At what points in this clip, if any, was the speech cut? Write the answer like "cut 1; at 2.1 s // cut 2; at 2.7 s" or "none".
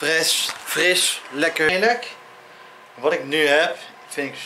cut 1; at 1.7 s